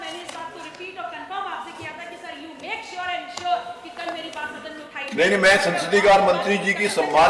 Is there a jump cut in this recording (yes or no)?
no